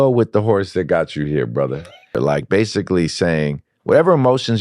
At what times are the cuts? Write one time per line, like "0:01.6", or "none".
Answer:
0:02.2